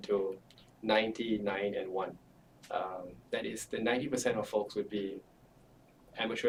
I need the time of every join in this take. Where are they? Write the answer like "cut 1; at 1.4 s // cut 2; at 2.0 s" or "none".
none